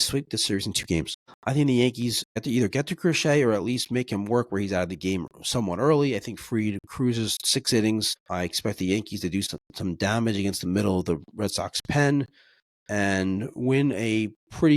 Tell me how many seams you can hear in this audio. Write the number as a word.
four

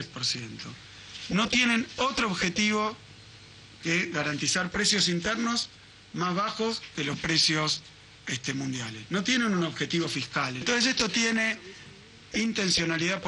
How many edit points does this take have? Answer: one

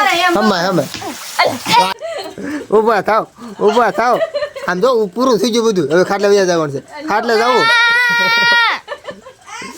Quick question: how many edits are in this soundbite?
one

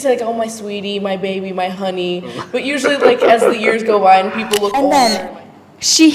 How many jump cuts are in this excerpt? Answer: one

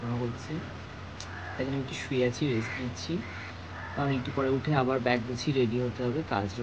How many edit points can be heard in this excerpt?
zero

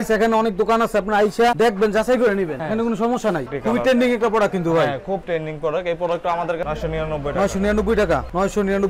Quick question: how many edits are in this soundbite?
two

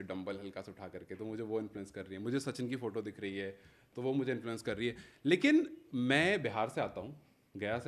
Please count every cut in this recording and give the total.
zero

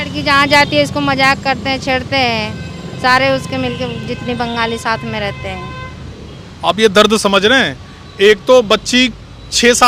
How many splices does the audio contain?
zero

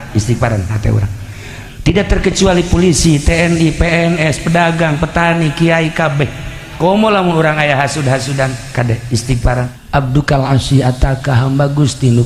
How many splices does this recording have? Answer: one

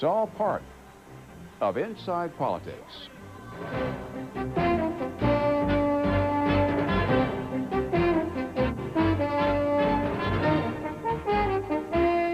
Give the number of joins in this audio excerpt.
zero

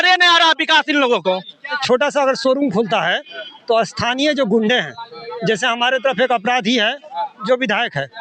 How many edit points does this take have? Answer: one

